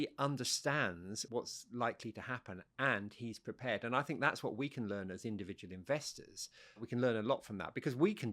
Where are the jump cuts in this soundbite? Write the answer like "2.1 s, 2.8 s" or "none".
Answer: 1.2 s, 6.8 s